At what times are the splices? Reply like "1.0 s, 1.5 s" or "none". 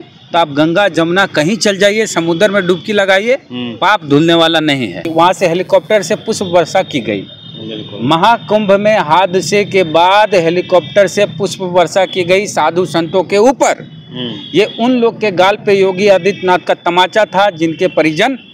5.0 s